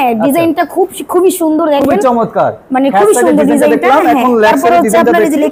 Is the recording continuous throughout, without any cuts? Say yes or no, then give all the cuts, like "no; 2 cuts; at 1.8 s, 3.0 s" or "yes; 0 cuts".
yes; 0 cuts